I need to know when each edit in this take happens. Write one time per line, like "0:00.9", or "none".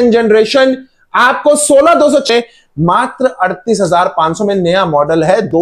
0:02.2